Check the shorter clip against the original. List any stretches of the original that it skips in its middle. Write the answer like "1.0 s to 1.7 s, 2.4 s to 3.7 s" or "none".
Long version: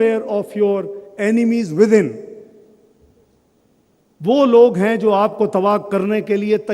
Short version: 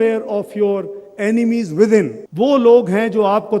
2.2 s to 4.1 s